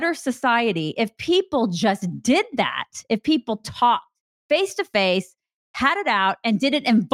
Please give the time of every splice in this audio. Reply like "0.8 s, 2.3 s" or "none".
none